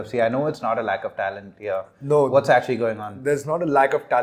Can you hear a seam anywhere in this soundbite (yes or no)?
no